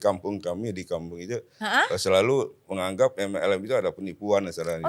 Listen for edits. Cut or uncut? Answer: uncut